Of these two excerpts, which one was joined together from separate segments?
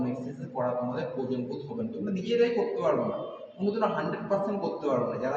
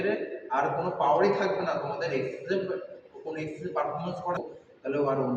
second; 1 cut; at 4.4 s

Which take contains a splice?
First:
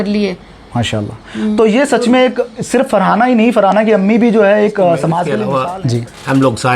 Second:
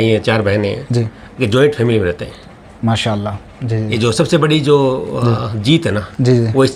first; 1 cut; at 5.4 s

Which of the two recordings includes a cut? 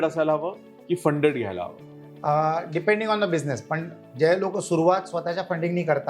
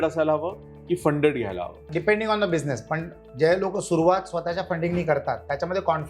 second; 1 cut; at 1.9 s

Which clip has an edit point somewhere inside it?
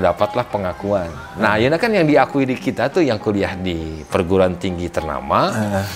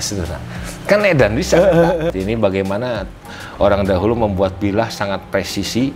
second; 1 cut; at 2.1 s

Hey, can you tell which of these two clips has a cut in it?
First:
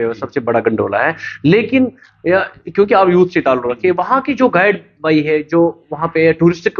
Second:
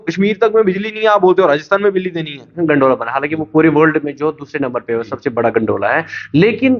second; 1 cut; at 2.5 s

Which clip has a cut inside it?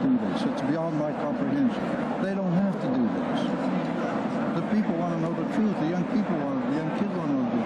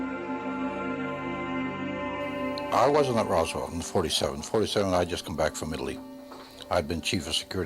first; 1 cut; at 3.0 s

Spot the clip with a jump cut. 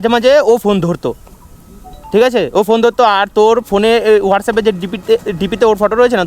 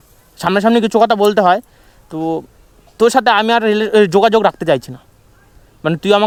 first; 1 cut; at 1.3 s

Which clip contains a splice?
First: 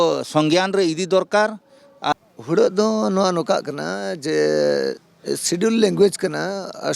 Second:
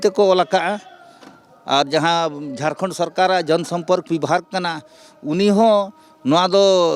first; 1 cut; at 2.1 s

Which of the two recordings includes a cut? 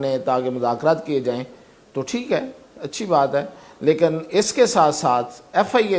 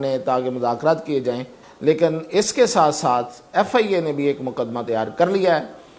second; 1 cut; at 1.6 s

